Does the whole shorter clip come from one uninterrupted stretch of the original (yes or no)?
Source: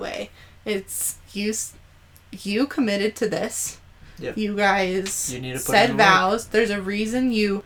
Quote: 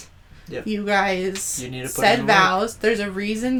yes